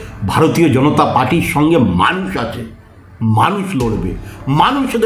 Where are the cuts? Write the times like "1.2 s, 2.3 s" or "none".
none

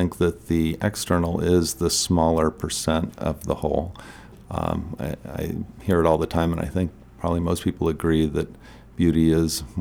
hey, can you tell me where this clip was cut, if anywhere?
none

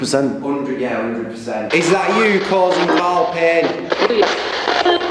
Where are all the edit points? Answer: 1.7 s, 3.9 s

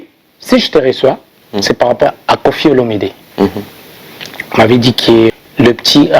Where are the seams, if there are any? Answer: 2.1 s, 5.3 s

